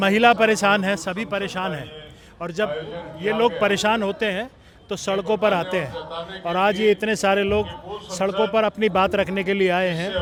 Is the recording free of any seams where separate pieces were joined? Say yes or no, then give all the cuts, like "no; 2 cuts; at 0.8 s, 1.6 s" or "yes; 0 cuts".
yes; 0 cuts